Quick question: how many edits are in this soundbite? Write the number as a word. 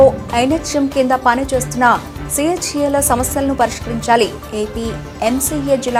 zero